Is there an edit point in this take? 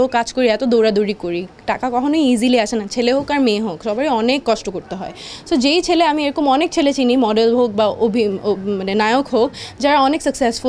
no; 0 cuts

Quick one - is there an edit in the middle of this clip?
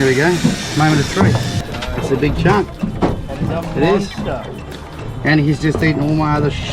yes; 1 cut; at 1.7 s

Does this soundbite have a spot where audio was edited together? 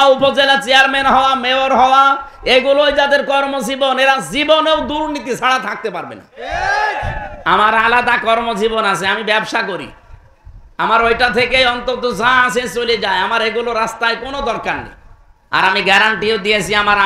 no; 0 cuts

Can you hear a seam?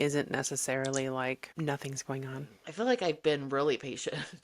yes; 1 cut; at 2.6 s

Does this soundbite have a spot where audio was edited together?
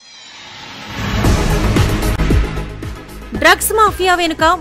yes; 1 cut; at 2.2 s

